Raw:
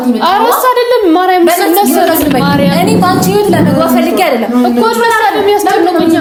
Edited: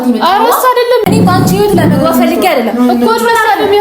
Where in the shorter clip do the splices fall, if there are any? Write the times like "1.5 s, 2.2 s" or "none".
1.0 s